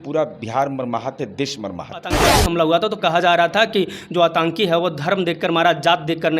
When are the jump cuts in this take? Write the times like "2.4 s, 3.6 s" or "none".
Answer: 2.3 s